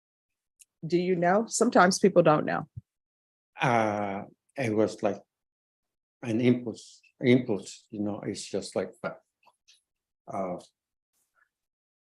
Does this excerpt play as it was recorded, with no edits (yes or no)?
yes